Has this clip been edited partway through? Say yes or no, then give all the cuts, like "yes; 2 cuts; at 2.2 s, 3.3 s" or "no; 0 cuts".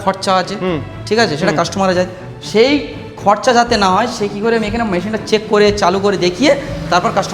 no; 0 cuts